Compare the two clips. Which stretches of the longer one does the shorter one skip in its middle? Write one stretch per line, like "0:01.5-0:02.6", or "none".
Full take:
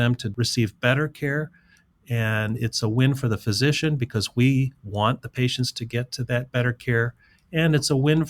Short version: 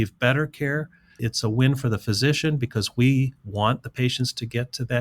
0:01.8-0:02.6